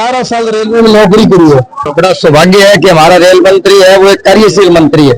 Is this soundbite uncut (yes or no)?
no